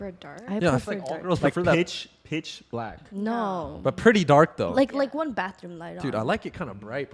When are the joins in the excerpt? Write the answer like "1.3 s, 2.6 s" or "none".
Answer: none